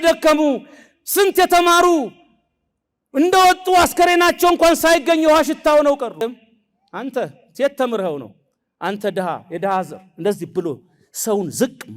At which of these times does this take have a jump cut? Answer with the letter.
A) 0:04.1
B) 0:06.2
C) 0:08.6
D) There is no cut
B